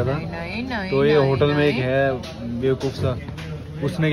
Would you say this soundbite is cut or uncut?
uncut